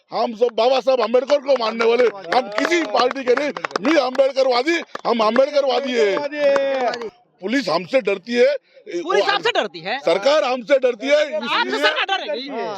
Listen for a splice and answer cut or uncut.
cut